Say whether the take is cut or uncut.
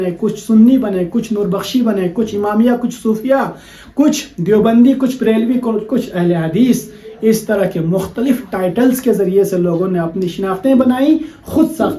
uncut